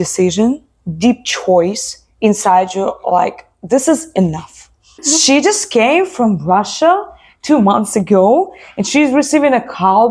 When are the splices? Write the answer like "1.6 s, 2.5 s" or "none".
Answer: 5.0 s

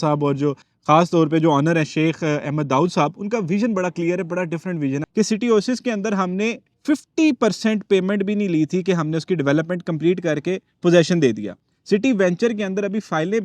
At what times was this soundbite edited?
5.1 s

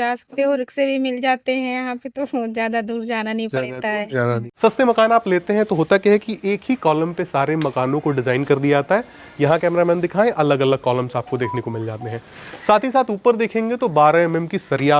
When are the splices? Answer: 4.5 s

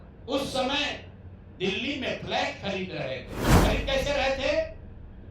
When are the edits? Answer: 3.6 s

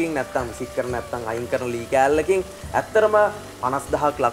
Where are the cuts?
none

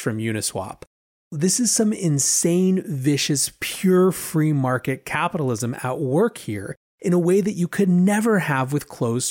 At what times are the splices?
1.3 s

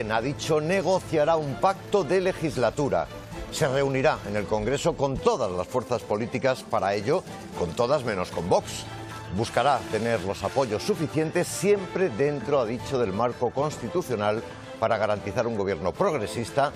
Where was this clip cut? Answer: none

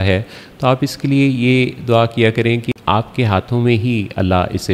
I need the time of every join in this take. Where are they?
2.6 s

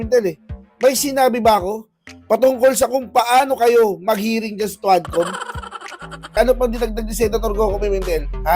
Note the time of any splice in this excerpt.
6.3 s

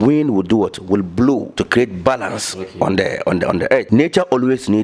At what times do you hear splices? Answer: 1.5 s, 3.9 s

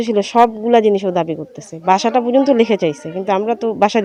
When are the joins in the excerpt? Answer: none

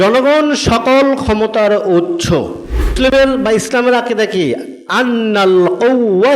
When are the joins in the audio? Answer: 2.9 s

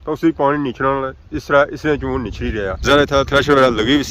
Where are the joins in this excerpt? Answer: 2.8 s

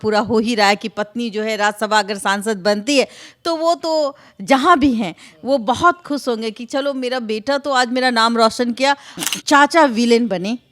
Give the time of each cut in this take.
9.2 s

